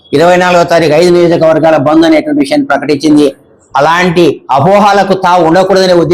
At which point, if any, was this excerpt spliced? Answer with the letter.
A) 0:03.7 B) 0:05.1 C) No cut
C